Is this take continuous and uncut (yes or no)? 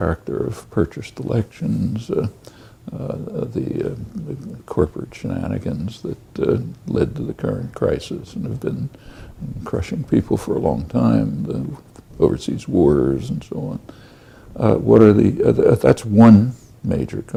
yes